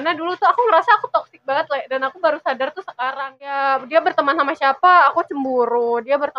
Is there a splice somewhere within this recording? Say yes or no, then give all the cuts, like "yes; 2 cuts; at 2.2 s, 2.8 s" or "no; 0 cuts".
yes; 1 cut; at 3.5 s